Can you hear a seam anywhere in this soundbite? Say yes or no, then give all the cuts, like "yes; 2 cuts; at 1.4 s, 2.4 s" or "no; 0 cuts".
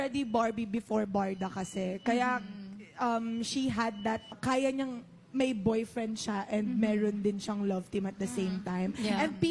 yes; 1 cut; at 4.3 s